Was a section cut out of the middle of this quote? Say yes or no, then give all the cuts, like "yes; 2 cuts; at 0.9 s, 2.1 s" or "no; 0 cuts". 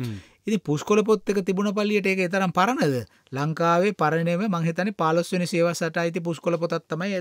no; 0 cuts